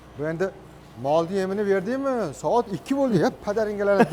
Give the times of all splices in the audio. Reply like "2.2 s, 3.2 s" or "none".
none